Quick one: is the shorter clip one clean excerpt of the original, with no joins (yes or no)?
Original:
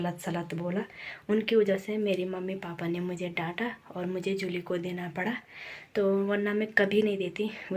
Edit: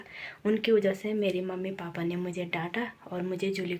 yes